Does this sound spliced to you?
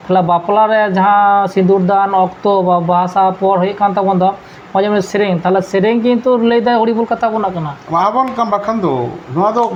no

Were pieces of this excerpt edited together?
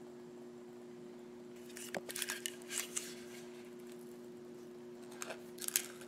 yes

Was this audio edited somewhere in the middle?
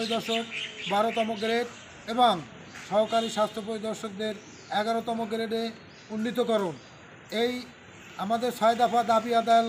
no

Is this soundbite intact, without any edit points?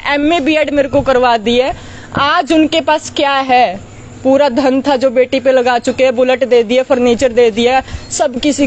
yes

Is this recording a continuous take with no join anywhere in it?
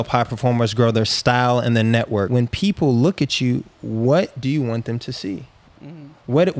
no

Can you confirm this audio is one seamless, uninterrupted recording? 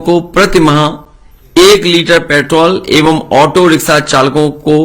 yes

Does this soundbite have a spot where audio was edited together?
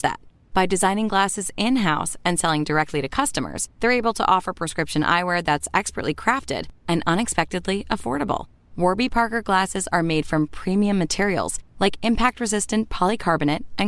no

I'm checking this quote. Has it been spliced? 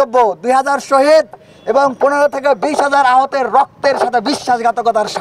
no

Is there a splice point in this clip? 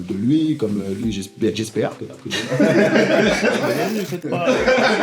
yes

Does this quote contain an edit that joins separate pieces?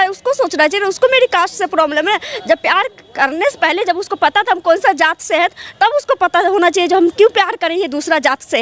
no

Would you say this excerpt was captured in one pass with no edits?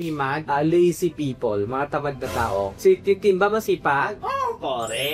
yes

